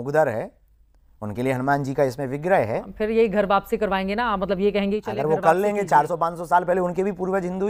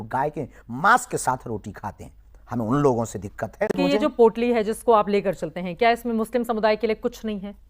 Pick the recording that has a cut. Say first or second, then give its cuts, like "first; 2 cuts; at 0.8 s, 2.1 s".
second; 1 cut; at 3.7 s